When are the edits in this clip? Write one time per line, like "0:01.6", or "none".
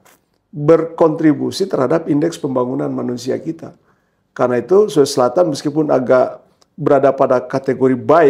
none